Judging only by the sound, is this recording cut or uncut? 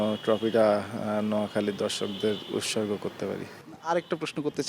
uncut